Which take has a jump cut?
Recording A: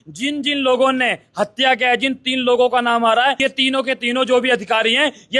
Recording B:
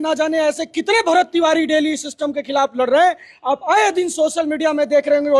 A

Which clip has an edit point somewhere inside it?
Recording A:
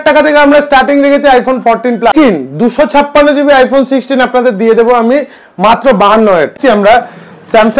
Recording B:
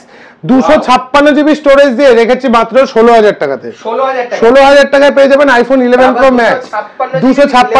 A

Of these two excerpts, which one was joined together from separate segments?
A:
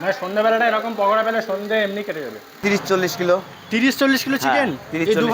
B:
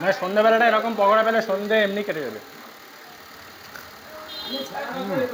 A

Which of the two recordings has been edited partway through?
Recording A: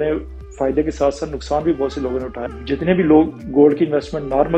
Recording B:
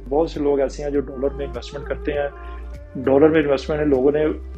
A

